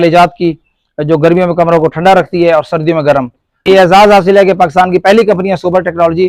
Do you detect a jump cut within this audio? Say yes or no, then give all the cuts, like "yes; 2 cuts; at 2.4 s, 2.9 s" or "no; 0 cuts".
yes; 1 cut; at 3.4 s